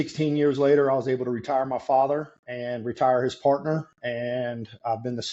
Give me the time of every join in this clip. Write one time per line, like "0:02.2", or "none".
none